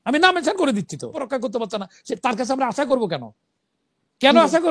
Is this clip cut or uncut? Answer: cut